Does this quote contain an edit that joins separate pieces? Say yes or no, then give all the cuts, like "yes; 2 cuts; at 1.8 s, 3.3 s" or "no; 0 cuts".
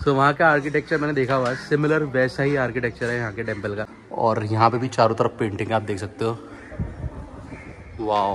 yes; 1 cut; at 4.0 s